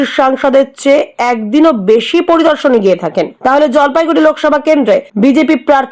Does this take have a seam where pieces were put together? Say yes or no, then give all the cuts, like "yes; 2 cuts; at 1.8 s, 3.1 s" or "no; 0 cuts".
yes; 2 cuts; at 3.3 s, 5.1 s